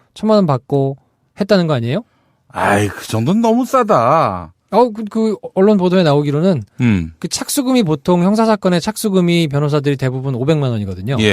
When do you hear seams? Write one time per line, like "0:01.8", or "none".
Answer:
0:02.1